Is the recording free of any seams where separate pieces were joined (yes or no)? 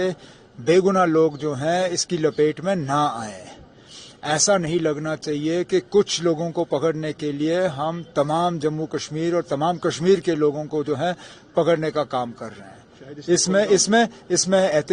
no